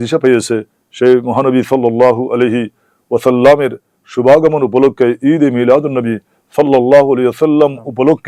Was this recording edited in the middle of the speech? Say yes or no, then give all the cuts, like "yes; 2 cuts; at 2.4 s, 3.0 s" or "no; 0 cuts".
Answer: no; 0 cuts